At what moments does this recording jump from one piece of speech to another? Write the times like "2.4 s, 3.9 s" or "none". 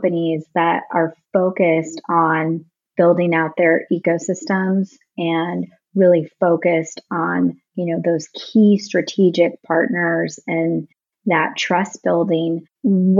none